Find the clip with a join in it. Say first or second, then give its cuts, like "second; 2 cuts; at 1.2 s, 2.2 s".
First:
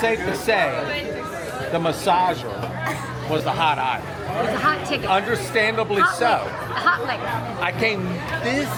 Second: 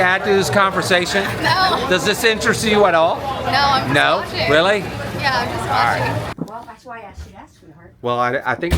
second; 1 cut; at 6.3 s